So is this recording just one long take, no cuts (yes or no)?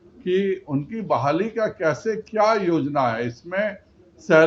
yes